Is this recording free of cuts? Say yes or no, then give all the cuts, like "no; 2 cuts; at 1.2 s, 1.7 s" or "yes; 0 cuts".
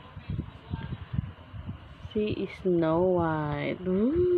yes; 0 cuts